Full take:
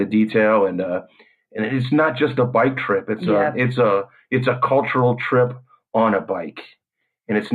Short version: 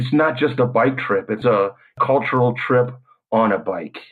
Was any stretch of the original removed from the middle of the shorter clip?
yes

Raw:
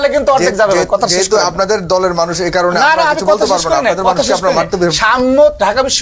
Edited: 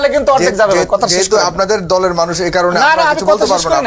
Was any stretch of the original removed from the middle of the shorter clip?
no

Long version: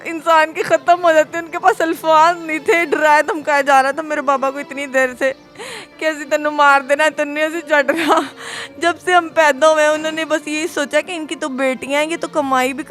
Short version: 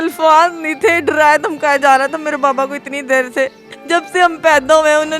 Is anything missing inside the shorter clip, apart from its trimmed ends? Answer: yes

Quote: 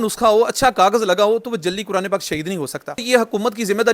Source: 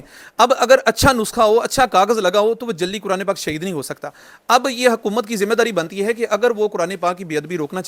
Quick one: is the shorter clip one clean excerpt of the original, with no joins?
no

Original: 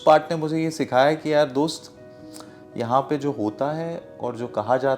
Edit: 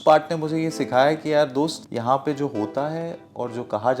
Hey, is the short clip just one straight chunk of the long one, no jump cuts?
no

